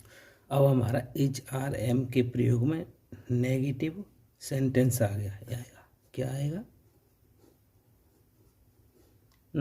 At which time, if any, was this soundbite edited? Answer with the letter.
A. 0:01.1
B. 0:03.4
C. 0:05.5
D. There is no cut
C